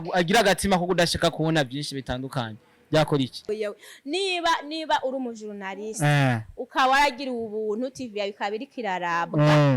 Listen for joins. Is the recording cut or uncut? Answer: cut